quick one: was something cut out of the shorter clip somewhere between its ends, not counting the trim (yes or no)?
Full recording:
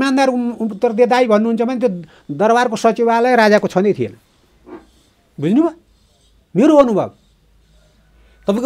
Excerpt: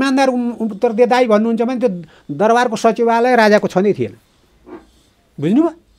no